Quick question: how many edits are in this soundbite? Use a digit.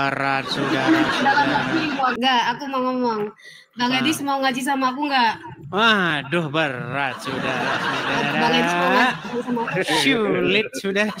1